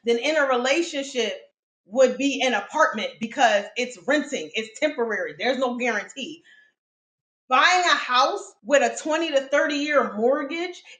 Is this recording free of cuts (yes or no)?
yes